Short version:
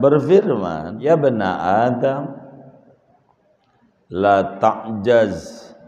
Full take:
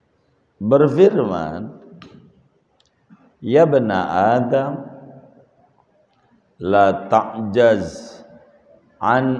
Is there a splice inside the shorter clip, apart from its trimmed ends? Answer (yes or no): yes